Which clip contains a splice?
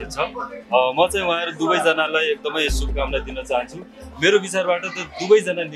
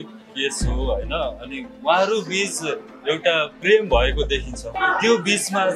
second; 2 cuts; at 3.2 s, 4.7 s

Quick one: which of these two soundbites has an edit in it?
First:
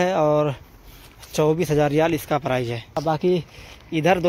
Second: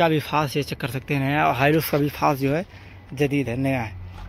first; 1 cut; at 3.0 s

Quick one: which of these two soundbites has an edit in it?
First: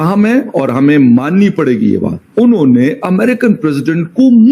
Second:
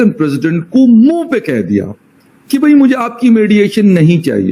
first; 1 cut; at 2.2 s

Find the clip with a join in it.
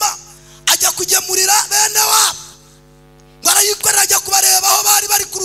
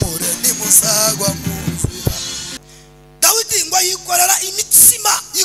second; 1 cut; at 2.5 s

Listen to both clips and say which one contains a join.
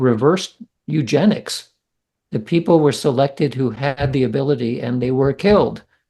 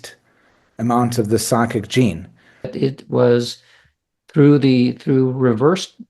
second; 1 cut; at 2.7 s

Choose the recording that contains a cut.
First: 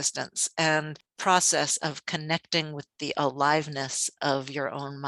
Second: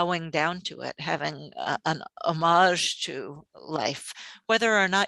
first; 1 cut; at 1.0 s

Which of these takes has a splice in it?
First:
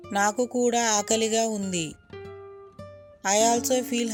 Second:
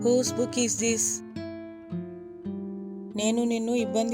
second; 2 cuts; at 1.3 s, 3.1 s

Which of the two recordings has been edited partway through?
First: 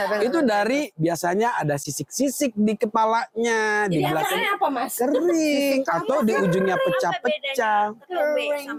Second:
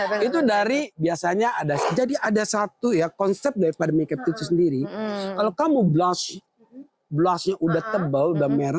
second; 1 cut; at 1.8 s

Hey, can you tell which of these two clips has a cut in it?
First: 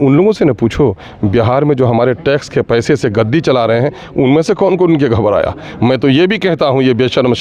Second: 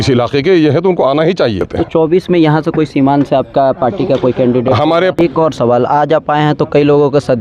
second; 2 cuts; at 1.7 s, 5.1 s

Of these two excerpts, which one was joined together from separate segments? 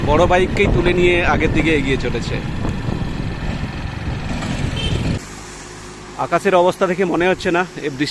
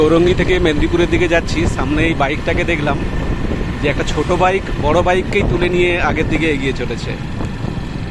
first; 1 cut; at 5.2 s

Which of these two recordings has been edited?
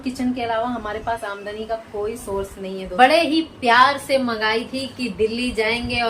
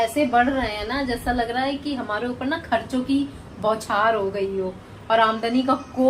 first; 1 cut; at 2.9 s

